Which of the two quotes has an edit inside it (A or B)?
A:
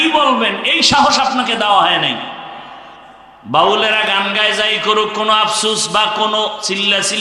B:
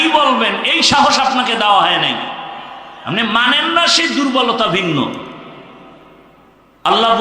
A